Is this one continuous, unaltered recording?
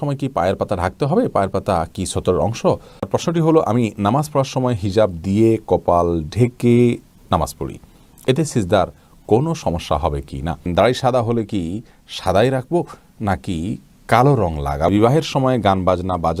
no; 3 cuts; at 3.0 s, 10.6 s, 14.9 s

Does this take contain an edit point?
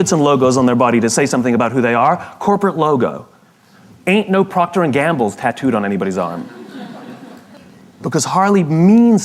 no; 0 cuts

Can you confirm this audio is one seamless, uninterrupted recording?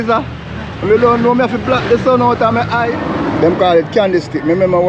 no; 1 cut; at 3.0 s

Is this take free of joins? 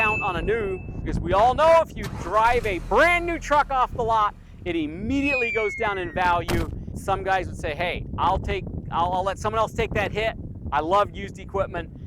no; 2 cuts; at 1.0 s, 6.9 s

